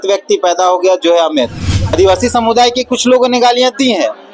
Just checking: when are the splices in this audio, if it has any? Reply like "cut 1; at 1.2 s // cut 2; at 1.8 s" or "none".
cut 1; at 2.0 s